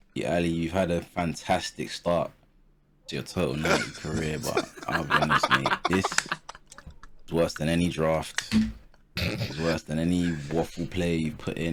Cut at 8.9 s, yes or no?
no